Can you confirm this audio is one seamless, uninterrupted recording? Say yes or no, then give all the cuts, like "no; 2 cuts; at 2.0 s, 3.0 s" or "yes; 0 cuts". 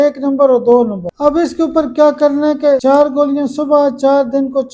no; 2 cuts; at 1.0 s, 2.8 s